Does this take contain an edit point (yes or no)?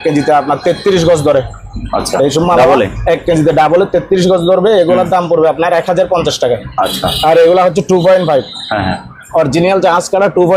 no